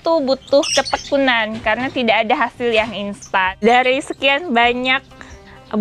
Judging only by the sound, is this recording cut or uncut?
cut